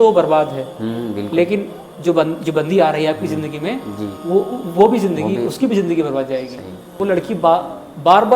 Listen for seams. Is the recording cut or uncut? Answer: cut